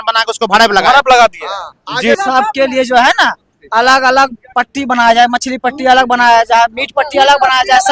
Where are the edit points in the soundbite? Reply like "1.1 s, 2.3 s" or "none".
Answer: 2.2 s